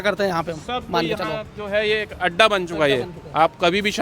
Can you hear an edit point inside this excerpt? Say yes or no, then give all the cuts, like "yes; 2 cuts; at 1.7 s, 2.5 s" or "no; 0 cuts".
no; 0 cuts